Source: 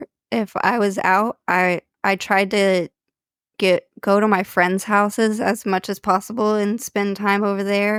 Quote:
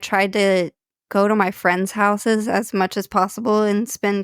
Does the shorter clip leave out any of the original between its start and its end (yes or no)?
yes